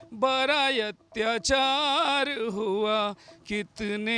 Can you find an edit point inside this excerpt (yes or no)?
no